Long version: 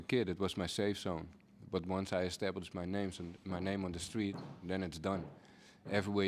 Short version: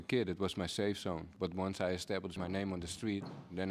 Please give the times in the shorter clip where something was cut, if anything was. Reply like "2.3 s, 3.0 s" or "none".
1.3 s, 2.3 s